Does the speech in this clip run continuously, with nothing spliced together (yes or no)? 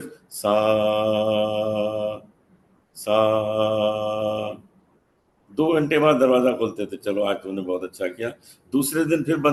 yes